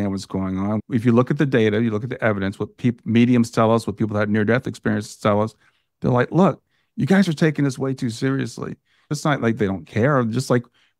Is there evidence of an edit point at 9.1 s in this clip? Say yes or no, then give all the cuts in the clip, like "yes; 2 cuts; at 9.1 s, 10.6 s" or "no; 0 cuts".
yes; 2 cuts; at 0.8 s, 9.1 s